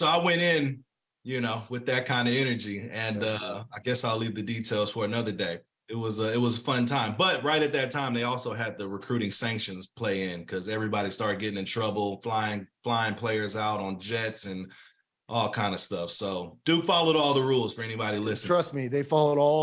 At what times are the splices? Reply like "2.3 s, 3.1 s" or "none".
5.6 s